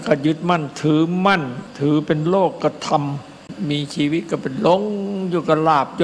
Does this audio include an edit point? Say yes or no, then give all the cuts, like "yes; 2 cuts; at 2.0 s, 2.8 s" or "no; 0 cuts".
yes; 2 cuts; at 1.7 s, 3.5 s